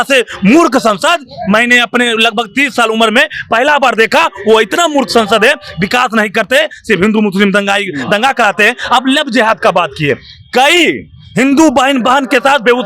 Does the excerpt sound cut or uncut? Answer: uncut